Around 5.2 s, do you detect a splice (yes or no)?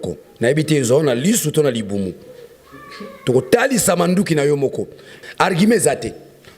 yes